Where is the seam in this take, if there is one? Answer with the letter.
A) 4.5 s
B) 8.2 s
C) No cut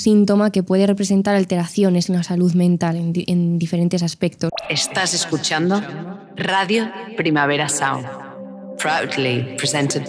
A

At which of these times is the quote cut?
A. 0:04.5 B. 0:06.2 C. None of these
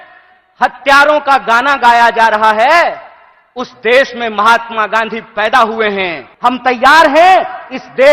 B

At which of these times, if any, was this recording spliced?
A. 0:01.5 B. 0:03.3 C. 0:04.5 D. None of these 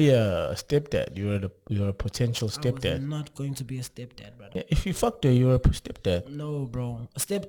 C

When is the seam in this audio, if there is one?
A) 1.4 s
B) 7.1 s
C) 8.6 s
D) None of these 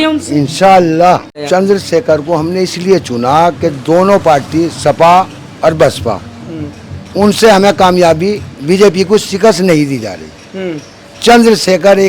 A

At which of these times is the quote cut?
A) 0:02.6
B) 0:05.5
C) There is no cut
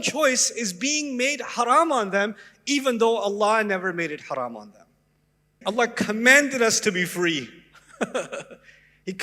B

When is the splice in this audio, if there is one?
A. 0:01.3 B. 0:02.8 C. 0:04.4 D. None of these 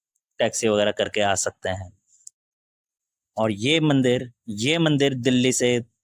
D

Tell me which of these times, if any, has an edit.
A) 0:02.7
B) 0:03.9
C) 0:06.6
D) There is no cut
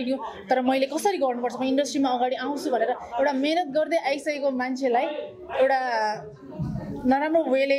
D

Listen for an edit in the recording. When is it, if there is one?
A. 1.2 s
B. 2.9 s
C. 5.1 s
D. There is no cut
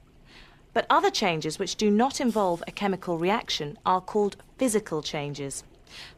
B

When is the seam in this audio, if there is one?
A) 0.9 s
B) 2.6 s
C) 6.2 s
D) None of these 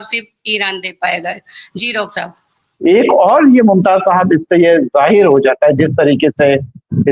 B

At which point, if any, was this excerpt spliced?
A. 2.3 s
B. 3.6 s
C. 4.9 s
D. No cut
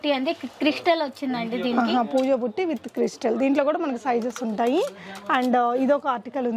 D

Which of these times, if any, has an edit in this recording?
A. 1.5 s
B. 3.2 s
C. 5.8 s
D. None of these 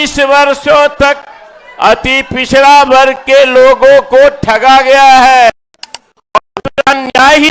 C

